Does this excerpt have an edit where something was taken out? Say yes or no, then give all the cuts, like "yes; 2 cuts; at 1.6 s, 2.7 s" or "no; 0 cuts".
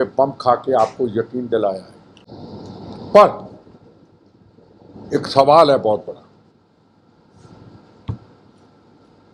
no; 0 cuts